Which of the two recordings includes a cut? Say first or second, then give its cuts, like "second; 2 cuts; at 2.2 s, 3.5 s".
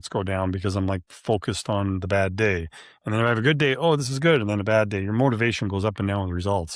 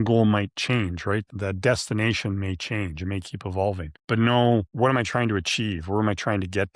second; 1 cut; at 1.3 s